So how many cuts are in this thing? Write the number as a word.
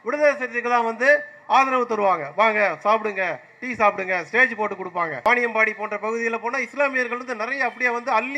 one